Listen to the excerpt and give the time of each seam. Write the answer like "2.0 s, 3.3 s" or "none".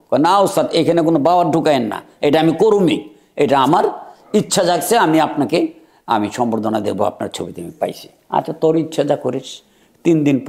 none

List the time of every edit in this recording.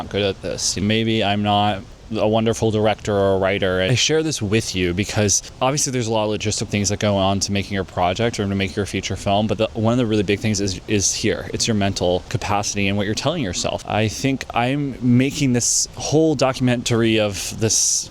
0.8 s, 3.9 s, 5.4 s

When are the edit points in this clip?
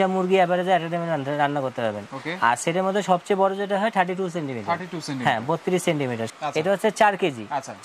6.2 s

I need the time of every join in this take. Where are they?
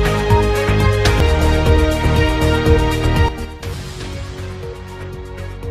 1.2 s

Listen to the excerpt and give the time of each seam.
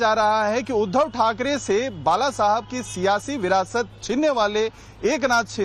2.8 s

